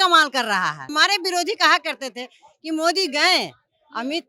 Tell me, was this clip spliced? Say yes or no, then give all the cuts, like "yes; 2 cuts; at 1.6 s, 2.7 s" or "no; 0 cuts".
yes; 1 cut; at 0.9 s